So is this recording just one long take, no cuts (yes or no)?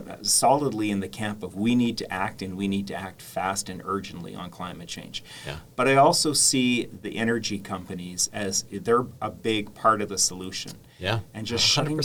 yes